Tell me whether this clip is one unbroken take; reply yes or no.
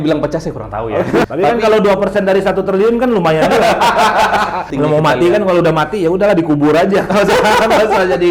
no